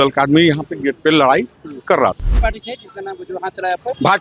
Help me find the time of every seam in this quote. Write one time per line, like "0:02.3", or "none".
0:02.4

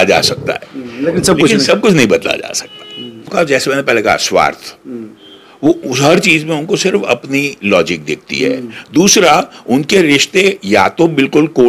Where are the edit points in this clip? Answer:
0:03.3

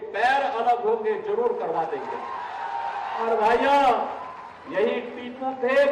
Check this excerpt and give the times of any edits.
0:03.1

